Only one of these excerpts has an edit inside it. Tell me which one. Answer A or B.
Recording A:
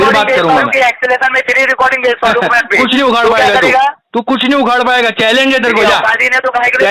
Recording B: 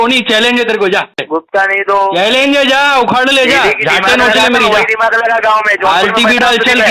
B